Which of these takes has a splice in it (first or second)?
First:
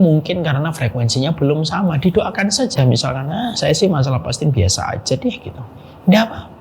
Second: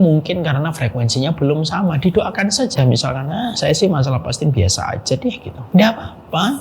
second